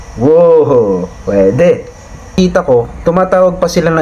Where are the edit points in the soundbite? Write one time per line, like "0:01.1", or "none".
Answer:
0:02.3

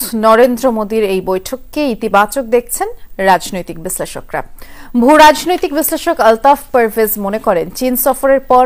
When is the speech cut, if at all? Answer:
none

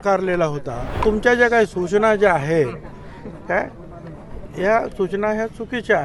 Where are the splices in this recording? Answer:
0:01.0

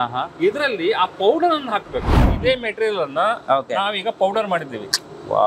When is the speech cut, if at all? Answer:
0:02.2

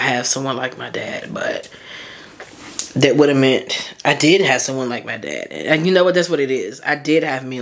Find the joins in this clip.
none

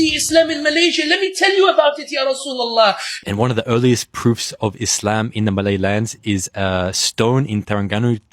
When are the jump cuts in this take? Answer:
0:03.2

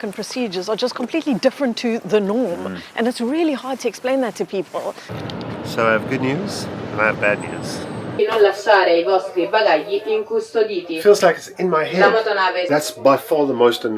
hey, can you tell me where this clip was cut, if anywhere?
0:05.1
0:08.1
0:12.6

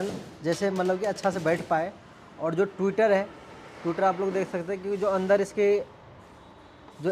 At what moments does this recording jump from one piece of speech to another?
none

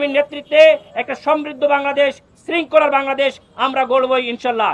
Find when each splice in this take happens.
none

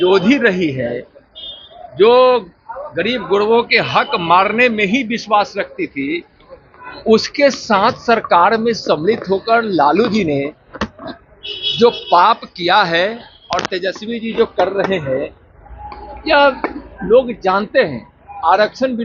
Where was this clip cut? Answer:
none

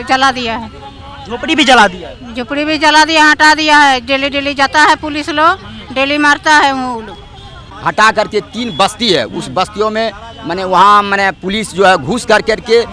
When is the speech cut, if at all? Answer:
0:07.7

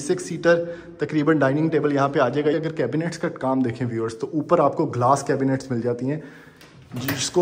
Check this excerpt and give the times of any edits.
0:02.5

